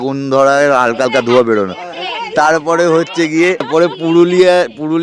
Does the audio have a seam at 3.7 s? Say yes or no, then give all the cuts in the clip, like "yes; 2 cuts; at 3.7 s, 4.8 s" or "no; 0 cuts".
yes; 1 cut; at 3.7 s